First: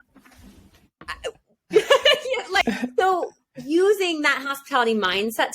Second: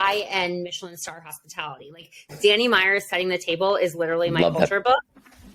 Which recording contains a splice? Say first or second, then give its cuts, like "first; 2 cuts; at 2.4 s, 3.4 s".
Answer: first; 1 cut; at 2.6 s